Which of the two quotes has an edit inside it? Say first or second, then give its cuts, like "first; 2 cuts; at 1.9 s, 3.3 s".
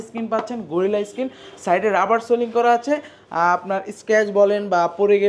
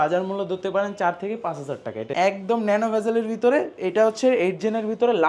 second; 1 cut; at 2.1 s